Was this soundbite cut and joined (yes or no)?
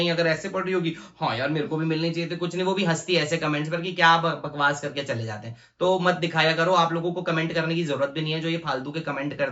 no